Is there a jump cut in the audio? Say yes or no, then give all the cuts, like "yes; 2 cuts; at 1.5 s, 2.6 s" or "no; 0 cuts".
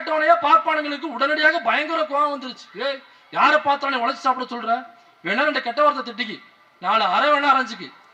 no; 0 cuts